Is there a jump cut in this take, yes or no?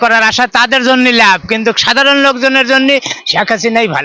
no